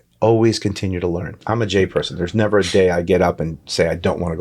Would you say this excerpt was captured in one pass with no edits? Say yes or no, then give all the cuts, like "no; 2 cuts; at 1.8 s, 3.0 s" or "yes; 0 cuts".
no; 1 cut; at 1.4 s